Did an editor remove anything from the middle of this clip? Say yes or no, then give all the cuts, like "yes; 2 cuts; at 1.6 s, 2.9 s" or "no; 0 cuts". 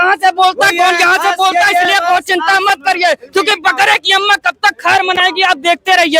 no; 0 cuts